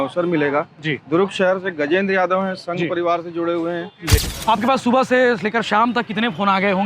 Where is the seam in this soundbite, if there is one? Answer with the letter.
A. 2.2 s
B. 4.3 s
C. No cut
B